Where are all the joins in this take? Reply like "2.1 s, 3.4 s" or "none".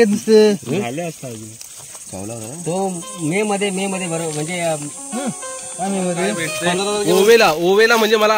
7.1 s